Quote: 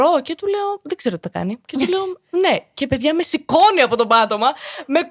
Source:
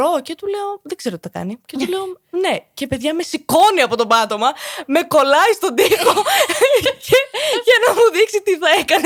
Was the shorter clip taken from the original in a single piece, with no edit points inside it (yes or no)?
yes